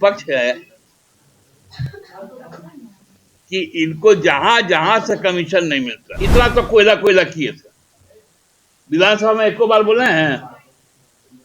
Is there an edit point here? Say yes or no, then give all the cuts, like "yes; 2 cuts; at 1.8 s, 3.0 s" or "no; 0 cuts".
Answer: yes; 1 cut; at 6.0 s